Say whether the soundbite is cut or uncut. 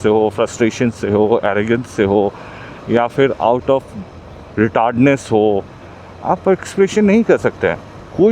uncut